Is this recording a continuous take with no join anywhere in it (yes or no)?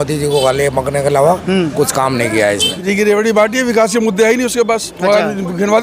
no